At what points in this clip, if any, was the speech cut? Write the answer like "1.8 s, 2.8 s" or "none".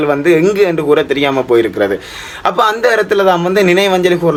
none